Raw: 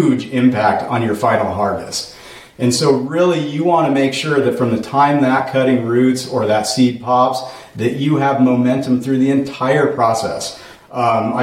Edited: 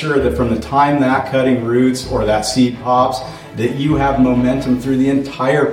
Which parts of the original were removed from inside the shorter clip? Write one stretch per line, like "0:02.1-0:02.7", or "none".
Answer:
none